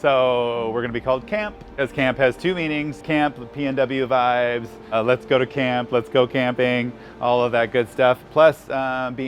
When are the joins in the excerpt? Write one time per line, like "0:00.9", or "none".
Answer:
0:01.8
0:03.0
0:04.9